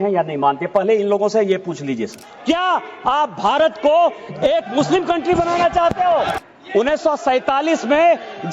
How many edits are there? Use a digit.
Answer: 2